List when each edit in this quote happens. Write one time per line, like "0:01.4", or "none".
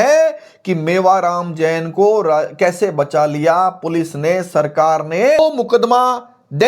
0:05.4